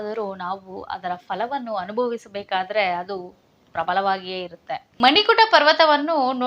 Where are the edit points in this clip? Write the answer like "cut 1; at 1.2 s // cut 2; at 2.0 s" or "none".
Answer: cut 1; at 4.9 s